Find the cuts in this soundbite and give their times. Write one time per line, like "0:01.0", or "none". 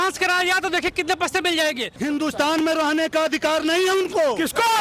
0:01.9